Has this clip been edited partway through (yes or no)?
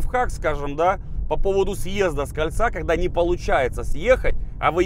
no